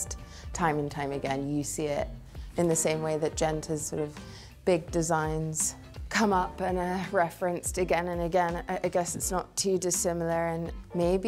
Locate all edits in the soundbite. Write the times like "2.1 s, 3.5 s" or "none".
none